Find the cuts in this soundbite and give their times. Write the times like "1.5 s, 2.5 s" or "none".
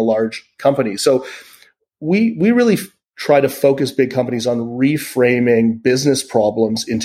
none